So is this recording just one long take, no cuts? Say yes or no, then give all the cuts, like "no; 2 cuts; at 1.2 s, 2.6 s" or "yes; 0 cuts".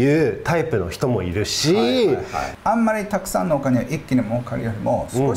no; 1 cut; at 2.4 s